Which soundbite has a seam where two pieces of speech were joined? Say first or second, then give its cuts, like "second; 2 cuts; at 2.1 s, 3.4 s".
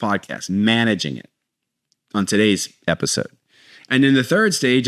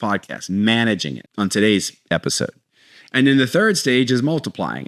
second; 1 cut; at 1.2 s